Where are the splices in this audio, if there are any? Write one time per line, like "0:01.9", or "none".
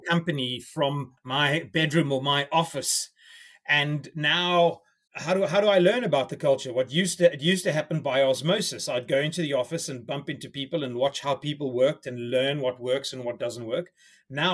0:01.1